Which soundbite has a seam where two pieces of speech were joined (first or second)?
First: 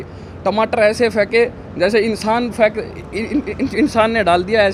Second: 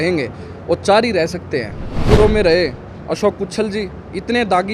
second